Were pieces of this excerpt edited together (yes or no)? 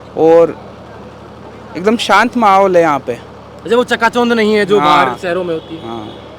no